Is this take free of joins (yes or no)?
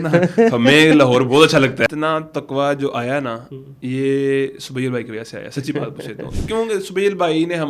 no